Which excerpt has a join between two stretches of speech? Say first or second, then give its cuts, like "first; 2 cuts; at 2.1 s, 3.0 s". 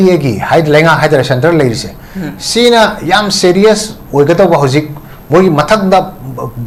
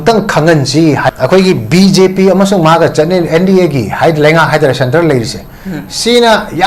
second; 1 cut; at 1.2 s